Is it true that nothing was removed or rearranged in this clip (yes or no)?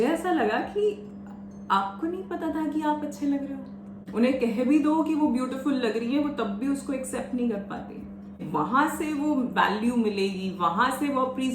no